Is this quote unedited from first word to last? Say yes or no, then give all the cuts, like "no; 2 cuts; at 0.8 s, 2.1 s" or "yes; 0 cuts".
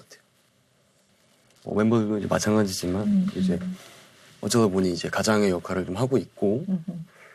yes; 0 cuts